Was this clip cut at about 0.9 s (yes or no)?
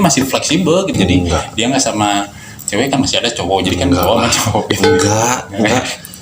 yes